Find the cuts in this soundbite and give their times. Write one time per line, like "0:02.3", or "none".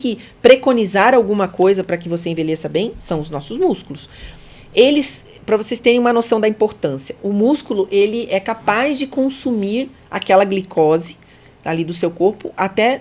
none